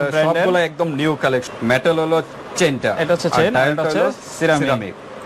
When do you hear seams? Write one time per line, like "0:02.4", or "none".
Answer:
0:01.5